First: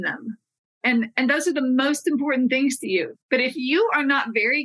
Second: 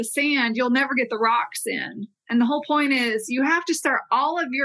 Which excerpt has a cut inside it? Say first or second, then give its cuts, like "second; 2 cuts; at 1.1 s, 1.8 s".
first; 1 cut; at 3.1 s